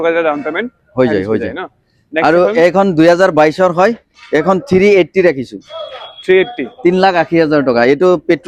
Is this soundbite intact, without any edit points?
yes; 0 cuts

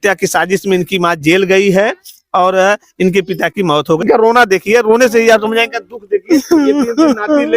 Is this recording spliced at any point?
yes; 1 cut; at 4.0 s

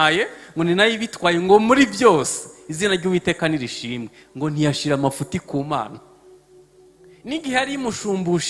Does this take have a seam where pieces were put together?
no; 0 cuts

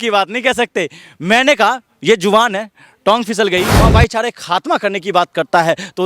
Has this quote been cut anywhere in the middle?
yes; 1 cut; at 3.7 s

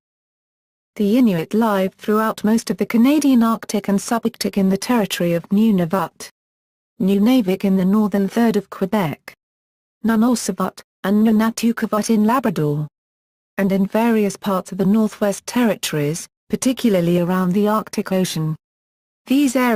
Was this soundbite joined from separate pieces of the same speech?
yes; 1 cut; at 10.2 s

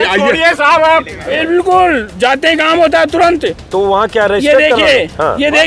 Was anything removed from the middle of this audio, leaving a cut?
yes; 1 cut; at 1.2 s

